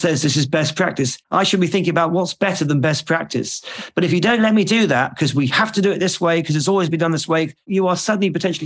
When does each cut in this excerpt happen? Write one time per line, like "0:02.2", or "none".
0:01.2
0:07.7